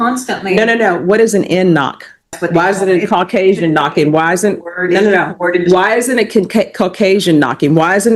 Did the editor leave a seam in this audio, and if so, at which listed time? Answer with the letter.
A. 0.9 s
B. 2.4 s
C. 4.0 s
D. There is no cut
B